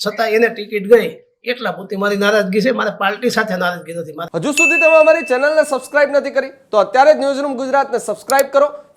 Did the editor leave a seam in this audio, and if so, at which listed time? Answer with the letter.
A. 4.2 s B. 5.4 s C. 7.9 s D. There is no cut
A